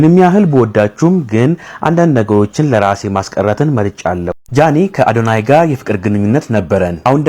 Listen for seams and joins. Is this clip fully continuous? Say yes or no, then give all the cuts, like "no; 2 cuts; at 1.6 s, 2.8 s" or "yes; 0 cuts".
no; 1 cut; at 4.4 s